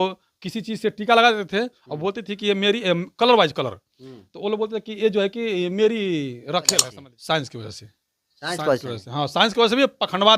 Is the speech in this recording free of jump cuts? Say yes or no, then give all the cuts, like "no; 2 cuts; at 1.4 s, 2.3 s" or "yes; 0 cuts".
no; 1 cut; at 6.9 s